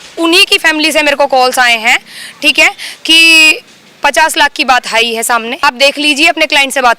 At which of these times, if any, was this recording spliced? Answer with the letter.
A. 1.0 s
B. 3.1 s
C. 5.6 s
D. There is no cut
C